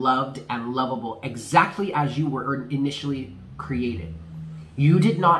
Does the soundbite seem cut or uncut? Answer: uncut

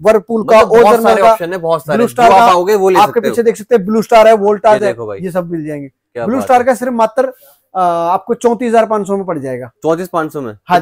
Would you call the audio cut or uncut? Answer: uncut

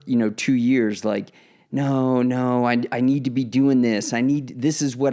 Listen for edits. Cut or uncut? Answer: uncut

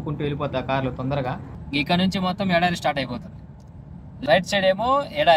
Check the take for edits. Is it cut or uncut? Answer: cut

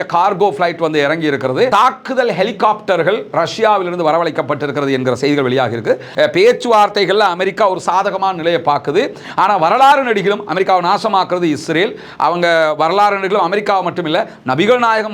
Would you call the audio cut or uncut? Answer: cut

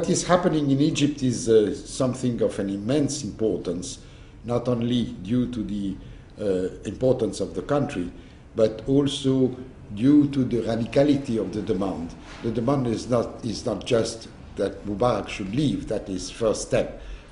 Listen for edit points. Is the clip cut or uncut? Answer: uncut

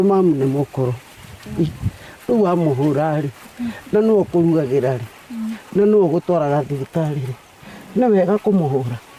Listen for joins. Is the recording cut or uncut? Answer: uncut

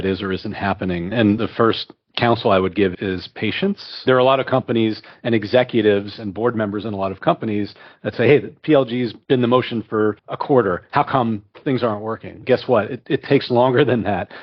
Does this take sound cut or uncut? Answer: cut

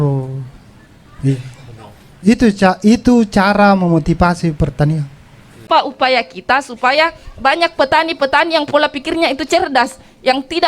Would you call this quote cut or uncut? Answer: cut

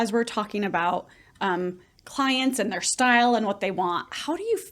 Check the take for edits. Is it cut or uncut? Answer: uncut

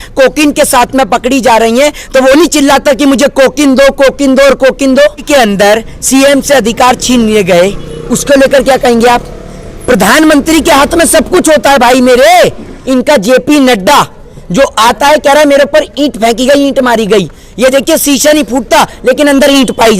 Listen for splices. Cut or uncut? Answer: cut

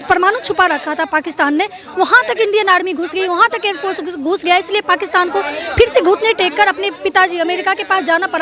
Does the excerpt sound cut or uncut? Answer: uncut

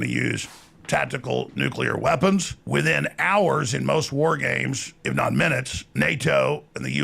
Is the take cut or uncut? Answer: cut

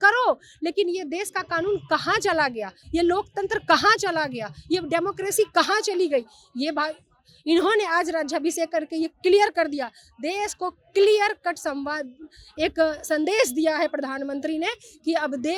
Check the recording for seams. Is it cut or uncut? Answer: uncut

